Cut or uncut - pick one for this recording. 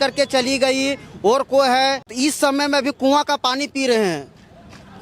cut